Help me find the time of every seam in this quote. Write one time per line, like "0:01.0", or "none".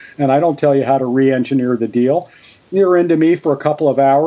none